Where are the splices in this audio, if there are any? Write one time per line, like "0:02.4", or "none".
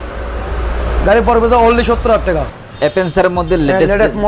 0:02.6